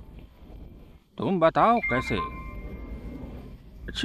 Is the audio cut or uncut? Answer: uncut